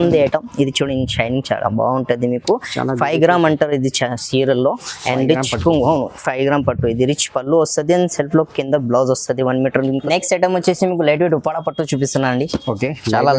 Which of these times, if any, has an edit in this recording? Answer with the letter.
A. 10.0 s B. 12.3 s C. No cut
A